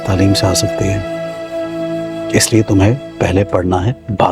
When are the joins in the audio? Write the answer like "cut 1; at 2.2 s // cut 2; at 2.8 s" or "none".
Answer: none